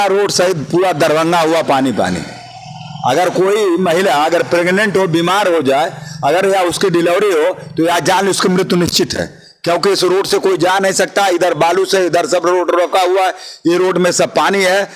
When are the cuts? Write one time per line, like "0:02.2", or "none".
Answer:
none